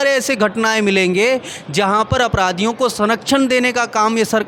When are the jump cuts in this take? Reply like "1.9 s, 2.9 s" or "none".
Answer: none